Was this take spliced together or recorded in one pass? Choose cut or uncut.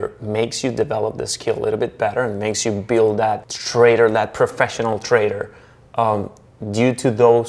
cut